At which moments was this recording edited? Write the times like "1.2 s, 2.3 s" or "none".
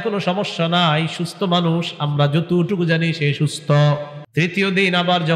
4.2 s

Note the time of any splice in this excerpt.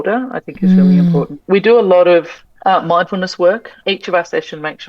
1.4 s, 3.8 s

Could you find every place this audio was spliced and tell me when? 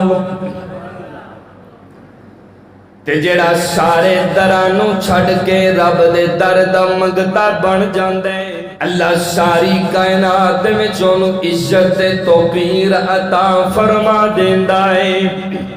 8.5 s

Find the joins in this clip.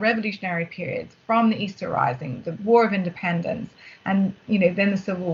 none

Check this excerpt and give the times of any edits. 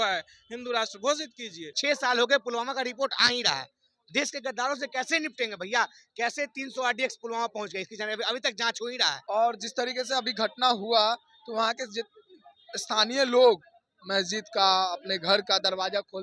1.8 s, 9.2 s

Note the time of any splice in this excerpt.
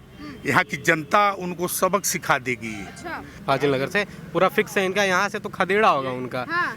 3.4 s

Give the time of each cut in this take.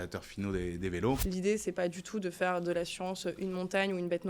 1.2 s

